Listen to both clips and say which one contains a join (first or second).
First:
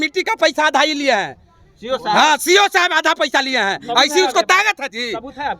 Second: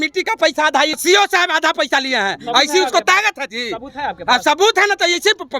second